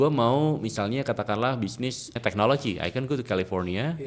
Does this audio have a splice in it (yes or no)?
yes